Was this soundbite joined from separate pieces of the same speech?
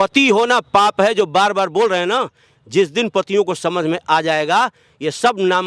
no; 0 cuts

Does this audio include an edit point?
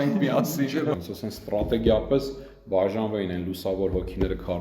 yes; 1 cut; at 0.9 s

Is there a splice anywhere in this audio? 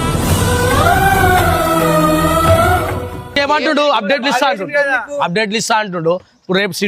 yes; 1 cut; at 3.3 s

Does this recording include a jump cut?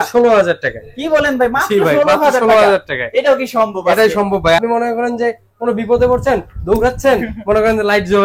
yes; 1 cut; at 4.6 s

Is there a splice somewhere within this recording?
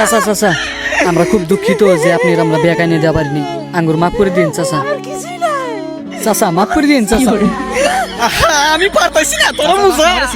no; 0 cuts

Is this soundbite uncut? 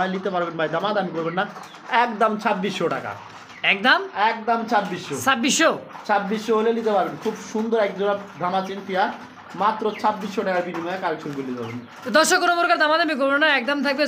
yes; 0 cuts

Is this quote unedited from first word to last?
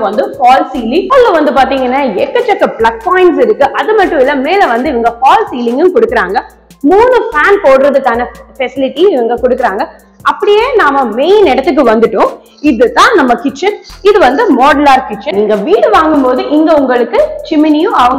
no; 2 cuts; at 1.1 s, 15.2 s

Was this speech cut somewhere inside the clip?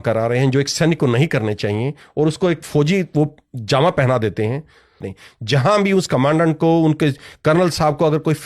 yes; 1 cut; at 5.0 s

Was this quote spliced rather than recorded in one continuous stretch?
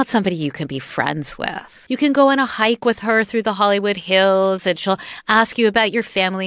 yes; 1 cut; at 1.8 s

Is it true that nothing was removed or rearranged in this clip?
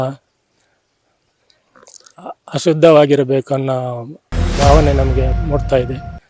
no; 1 cut; at 5.4 s

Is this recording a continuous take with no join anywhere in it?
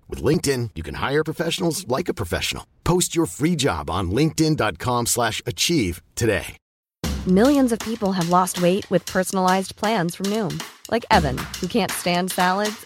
yes; 0 cuts

